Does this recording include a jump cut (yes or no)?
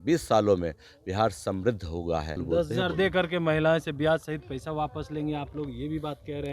yes